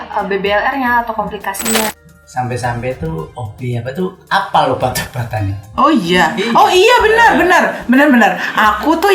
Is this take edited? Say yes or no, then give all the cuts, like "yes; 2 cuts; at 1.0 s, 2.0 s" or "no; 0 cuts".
yes; 1 cut; at 1.9 s